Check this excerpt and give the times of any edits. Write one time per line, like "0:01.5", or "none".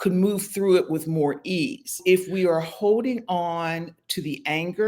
0:02.0

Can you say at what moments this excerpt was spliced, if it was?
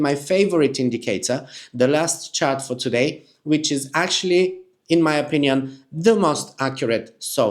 none

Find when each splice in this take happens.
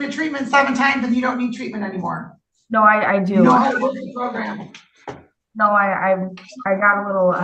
none

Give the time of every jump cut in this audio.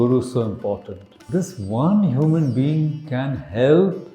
0:01.3

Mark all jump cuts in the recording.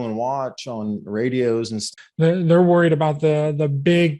0:01.8

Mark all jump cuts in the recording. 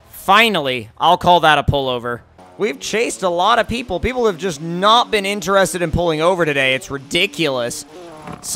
none

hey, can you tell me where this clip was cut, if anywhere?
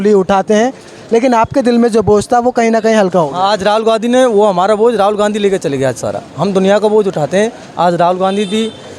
none

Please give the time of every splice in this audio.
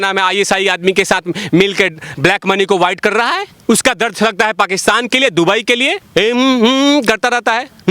0:03.5
0:06.0

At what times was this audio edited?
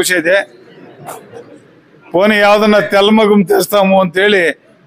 none

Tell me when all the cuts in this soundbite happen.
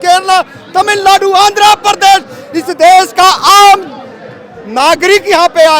none

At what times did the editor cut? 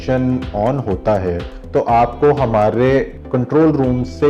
0:01.5
0:03.2

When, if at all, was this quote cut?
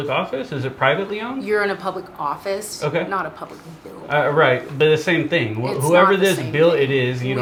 none

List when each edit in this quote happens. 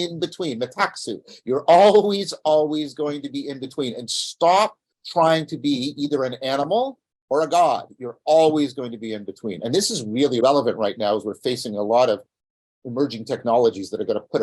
0:10.4

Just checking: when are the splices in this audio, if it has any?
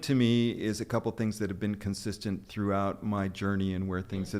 none

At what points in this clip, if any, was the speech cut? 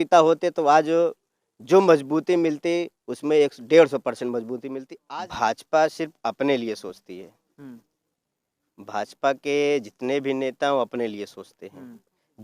0:04.9

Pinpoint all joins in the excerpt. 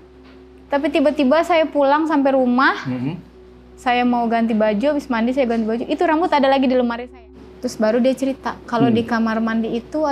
0:07.0

